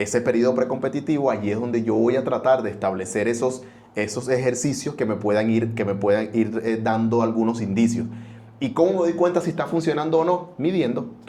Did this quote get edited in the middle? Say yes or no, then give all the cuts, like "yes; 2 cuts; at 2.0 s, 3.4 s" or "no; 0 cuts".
no; 0 cuts